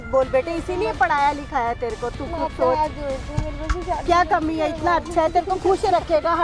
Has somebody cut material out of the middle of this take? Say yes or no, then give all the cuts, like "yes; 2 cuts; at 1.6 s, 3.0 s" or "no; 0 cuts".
no; 0 cuts